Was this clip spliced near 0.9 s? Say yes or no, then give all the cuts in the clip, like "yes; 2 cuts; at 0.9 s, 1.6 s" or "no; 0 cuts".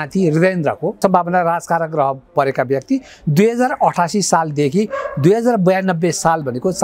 yes; 1 cut; at 0.9 s